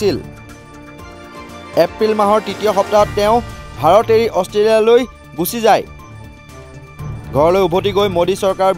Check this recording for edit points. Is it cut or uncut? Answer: uncut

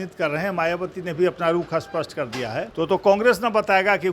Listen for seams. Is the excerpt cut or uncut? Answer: cut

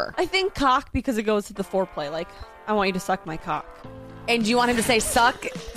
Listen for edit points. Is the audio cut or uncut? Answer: uncut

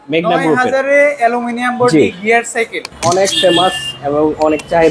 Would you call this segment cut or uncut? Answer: cut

